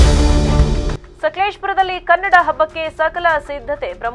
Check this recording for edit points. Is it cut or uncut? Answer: cut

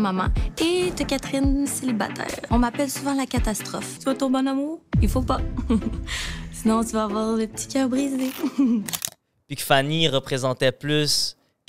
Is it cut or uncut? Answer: cut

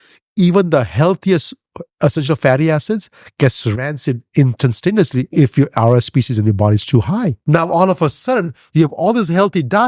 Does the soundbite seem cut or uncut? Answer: cut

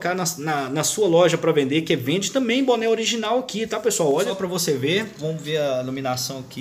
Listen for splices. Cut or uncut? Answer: cut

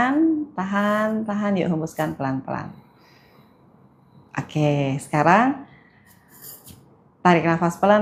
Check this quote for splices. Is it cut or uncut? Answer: uncut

